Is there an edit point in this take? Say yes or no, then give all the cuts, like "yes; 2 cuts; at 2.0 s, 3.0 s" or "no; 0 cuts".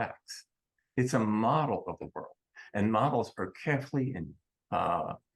no; 0 cuts